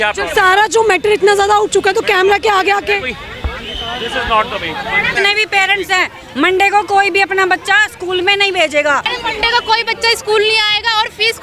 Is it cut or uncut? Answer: cut